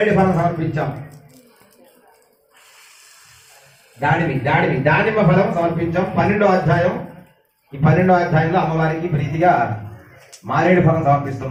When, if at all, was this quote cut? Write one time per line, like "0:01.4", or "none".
none